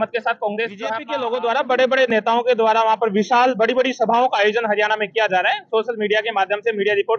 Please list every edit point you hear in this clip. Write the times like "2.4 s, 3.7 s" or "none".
1.0 s